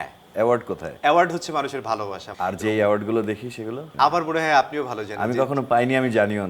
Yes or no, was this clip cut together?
yes